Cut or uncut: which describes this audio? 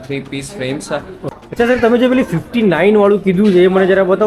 cut